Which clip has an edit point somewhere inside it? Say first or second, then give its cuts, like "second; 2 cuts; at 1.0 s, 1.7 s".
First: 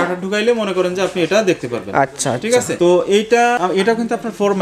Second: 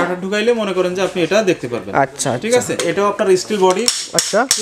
second; 1 cut; at 2.8 s